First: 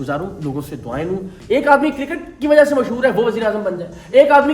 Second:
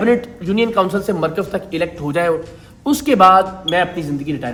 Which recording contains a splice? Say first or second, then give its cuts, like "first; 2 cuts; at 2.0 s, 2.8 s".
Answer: first; 1 cut; at 1.3 s